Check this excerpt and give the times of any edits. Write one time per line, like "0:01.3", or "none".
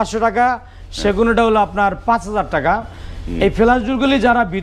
none